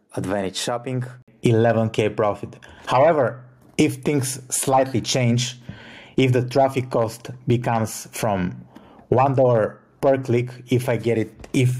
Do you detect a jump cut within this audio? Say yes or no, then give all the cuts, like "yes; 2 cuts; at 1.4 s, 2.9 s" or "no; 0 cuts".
yes; 1 cut; at 1.3 s